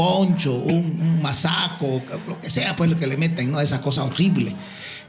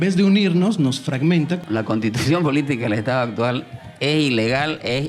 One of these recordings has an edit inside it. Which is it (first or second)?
second